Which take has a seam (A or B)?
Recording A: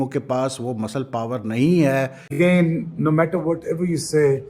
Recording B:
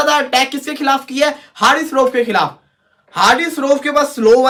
A